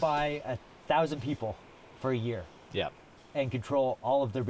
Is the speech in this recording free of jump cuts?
yes; 0 cuts

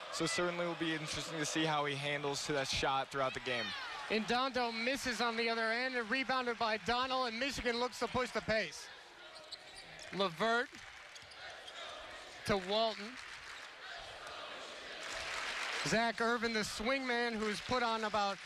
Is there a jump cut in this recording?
yes; 1 cut; at 16.1 s

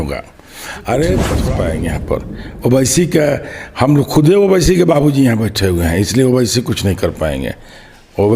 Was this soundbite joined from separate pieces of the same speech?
yes; 1 cut; at 1.5 s

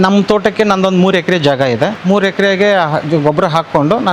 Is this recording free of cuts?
yes; 0 cuts

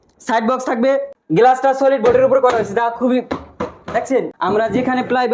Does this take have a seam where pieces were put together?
yes; 2 cuts; at 1.1 s, 4.3 s

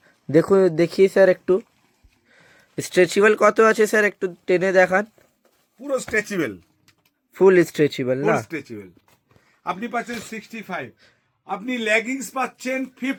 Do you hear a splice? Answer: no; 0 cuts

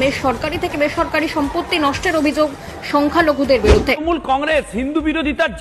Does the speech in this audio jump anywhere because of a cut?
yes; 1 cut; at 4.2 s

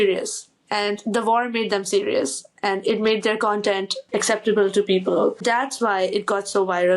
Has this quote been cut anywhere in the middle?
yes; 2 cuts; at 3.9 s, 5.4 s

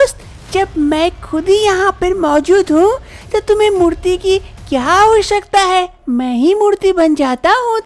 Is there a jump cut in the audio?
no; 0 cuts

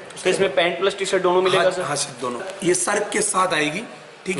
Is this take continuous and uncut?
no; 1 cut; at 2.5 s

